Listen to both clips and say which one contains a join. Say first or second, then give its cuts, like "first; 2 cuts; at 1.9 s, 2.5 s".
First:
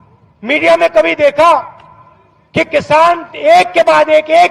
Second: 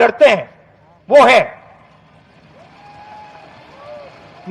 second; 1 cut; at 1.3 s